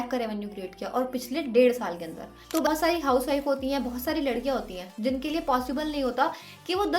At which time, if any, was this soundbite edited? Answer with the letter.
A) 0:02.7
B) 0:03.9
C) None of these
A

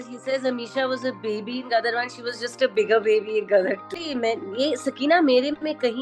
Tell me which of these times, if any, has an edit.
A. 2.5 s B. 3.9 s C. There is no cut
B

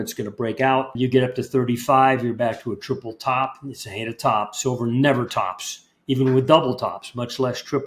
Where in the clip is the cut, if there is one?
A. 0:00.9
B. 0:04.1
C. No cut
A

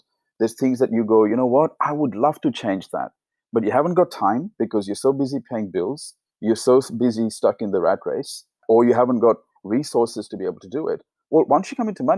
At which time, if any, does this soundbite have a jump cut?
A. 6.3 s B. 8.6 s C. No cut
B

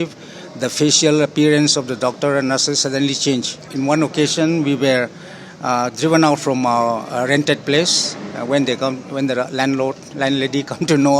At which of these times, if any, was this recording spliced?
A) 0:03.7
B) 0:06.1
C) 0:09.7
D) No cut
A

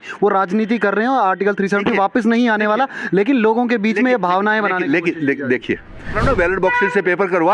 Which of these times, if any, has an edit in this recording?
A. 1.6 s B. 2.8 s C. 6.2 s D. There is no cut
C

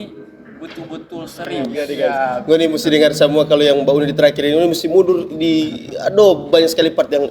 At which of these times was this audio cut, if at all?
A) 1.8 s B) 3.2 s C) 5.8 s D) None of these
A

